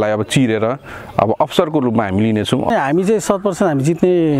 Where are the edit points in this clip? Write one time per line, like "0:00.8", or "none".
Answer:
0:02.7